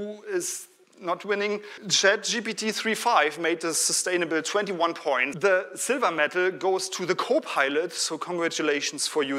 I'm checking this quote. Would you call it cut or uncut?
cut